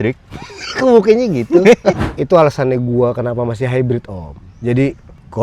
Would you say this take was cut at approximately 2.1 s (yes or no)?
yes